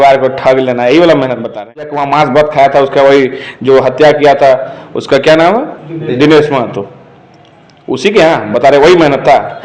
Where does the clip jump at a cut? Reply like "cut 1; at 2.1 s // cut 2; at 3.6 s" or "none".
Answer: cut 1; at 2.0 s